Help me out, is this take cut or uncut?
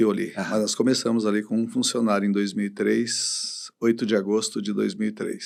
uncut